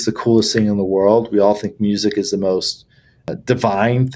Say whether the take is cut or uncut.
uncut